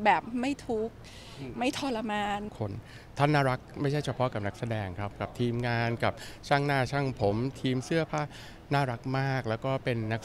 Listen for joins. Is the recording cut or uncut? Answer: cut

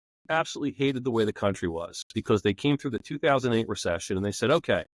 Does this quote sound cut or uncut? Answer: uncut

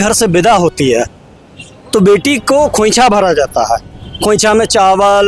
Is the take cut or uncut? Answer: uncut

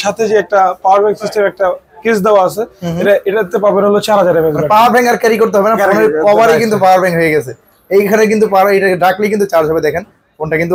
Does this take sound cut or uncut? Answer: uncut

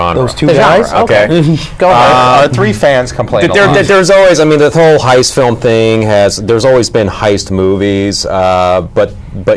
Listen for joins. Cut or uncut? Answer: cut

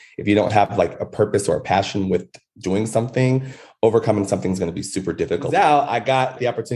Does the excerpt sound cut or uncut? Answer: cut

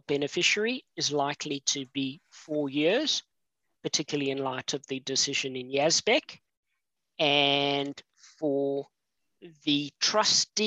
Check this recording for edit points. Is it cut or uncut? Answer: uncut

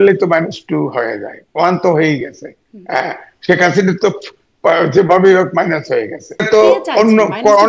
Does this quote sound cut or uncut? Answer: cut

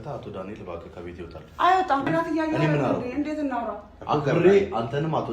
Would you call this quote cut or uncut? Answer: cut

